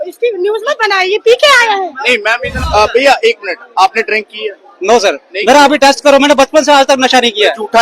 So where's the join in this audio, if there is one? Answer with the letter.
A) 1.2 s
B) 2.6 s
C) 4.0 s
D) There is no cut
B